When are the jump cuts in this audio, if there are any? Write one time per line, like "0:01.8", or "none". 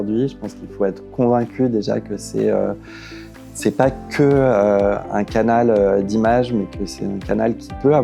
none